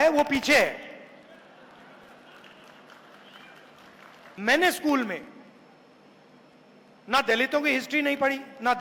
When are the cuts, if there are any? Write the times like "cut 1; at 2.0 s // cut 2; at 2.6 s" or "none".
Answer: cut 1; at 4.4 s